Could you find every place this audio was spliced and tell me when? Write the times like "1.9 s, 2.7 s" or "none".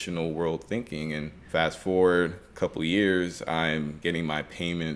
1.5 s, 2.4 s, 4.0 s